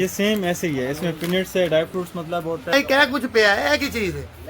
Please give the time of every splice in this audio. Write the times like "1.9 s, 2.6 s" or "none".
2.7 s